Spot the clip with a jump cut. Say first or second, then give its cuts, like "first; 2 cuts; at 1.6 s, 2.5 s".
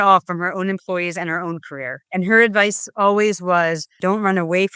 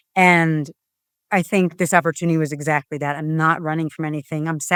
first; 2 cuts; at 2.0 s, 4.0 s